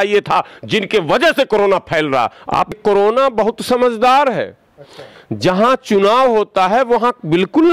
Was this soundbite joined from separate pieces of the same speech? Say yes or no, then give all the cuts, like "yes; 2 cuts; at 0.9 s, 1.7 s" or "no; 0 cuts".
yes; 1 cut; at 2.7 s